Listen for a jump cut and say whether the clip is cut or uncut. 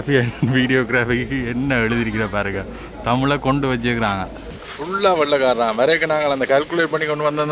cut